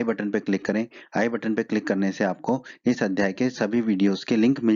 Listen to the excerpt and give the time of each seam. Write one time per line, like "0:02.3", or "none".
none